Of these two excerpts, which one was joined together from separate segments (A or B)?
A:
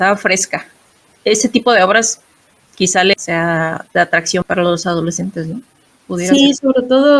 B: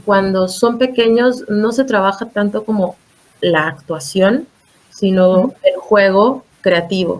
A